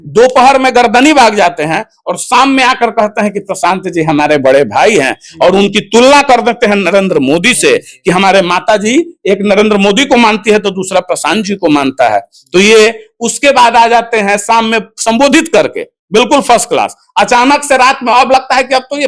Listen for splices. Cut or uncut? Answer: uncut